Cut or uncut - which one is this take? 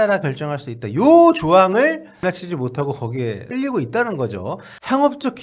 cut